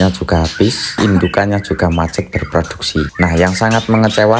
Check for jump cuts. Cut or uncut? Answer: cut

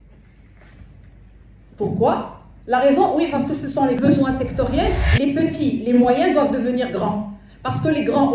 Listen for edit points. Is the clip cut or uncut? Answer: cut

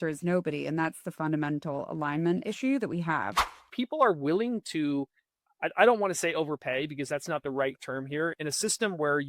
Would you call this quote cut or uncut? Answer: cut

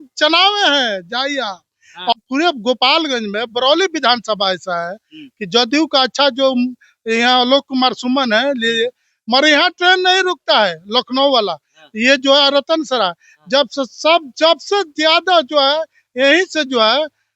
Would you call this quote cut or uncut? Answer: cut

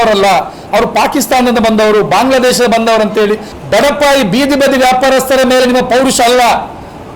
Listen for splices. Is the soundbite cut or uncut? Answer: cut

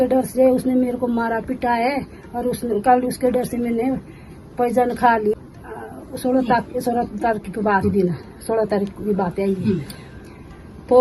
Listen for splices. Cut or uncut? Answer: uncut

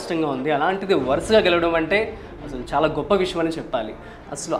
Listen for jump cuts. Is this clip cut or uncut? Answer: uncut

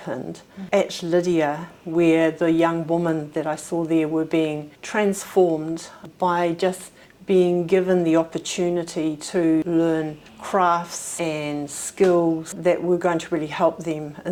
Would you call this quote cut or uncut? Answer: uncut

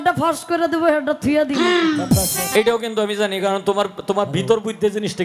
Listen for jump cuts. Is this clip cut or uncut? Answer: cut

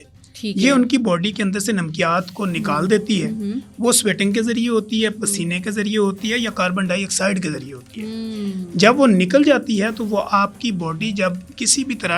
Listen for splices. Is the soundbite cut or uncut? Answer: uncut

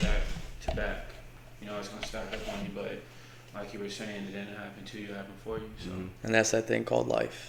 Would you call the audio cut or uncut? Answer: uncut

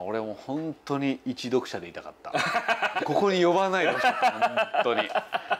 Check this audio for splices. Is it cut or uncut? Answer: cut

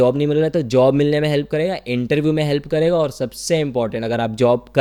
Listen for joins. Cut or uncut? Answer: uncut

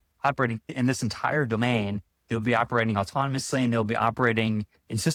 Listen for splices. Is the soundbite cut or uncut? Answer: uncut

